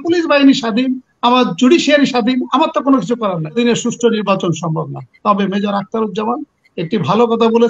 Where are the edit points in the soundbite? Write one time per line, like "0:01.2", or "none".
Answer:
0:03.6